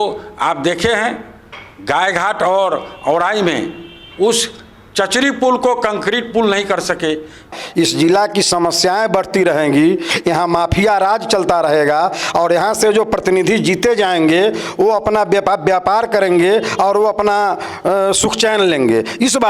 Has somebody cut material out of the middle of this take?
yes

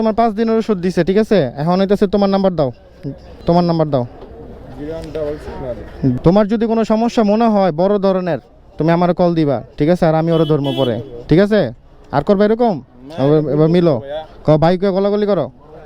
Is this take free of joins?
no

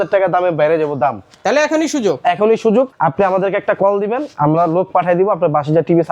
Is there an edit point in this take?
yes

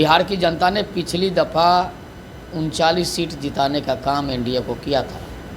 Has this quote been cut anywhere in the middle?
no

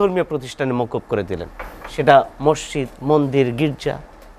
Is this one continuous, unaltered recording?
yes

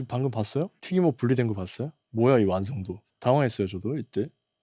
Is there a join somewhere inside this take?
no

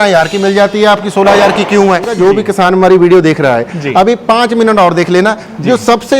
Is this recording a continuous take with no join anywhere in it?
no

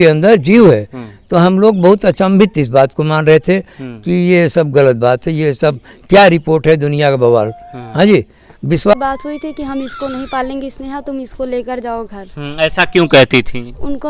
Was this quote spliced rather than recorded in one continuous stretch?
yes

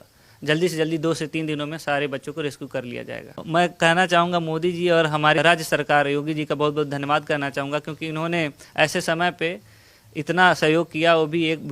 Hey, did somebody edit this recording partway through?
yes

